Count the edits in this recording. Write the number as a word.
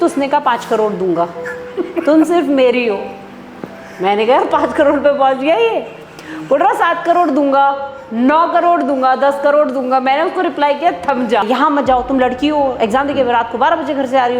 one